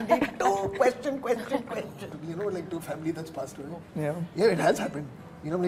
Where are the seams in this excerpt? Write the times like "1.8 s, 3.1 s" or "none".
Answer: 2.0 s